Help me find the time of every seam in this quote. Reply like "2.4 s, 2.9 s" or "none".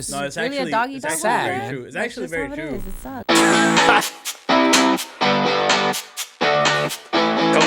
3.2 s